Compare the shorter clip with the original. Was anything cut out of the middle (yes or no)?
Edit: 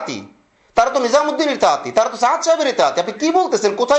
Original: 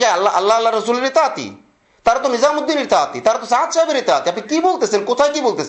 no